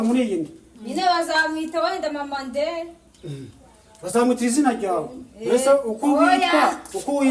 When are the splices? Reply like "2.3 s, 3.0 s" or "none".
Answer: none